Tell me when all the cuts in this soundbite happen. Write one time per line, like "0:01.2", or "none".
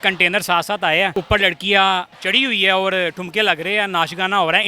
0:01.2
0:02.2